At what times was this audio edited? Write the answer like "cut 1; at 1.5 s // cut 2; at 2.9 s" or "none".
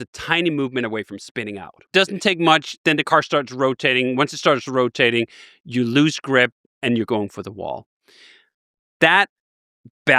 cut 1; at 1.8 s